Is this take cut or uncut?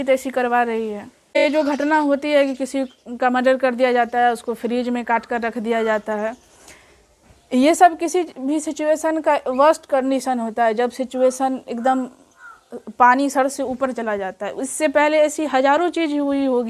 cut